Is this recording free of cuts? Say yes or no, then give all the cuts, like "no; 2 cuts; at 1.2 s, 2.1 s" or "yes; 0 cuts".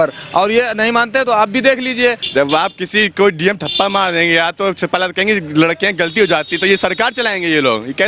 no; 1 cut; at 2.2 s